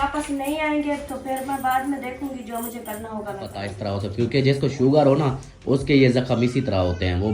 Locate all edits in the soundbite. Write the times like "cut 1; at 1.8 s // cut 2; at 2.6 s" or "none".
cut 1; at 3.7 s